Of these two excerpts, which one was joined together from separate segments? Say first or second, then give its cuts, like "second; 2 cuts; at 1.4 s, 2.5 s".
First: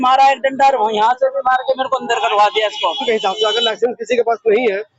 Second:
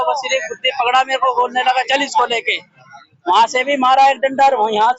first; 1 cut; at 2.9 s